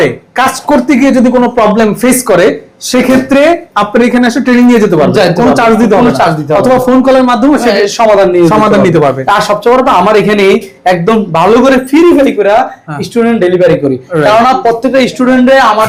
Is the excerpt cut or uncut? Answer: uncut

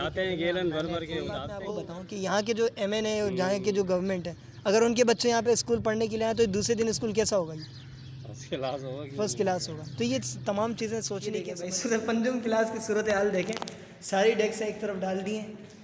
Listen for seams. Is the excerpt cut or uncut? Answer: cut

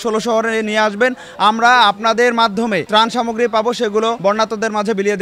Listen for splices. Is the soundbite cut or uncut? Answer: cut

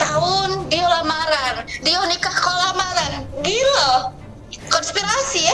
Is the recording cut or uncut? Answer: uncut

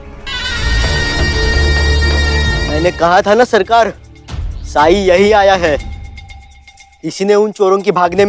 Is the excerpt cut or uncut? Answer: cut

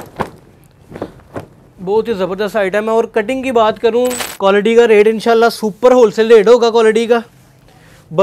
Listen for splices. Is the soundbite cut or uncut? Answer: cut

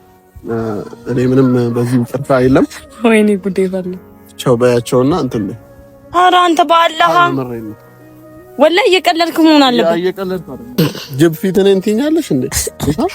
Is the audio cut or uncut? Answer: cut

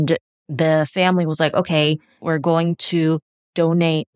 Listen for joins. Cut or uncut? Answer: uncut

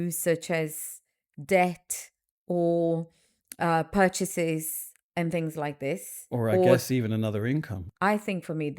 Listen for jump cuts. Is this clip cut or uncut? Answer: cut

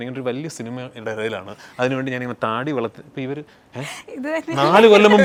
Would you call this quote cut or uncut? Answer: uncut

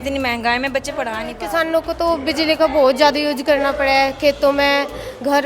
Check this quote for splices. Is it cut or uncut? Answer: cut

